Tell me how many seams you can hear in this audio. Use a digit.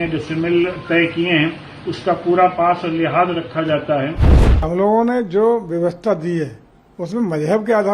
1